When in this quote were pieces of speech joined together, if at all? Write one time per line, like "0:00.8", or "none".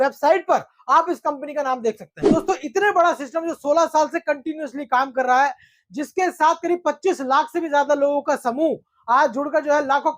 0:02.1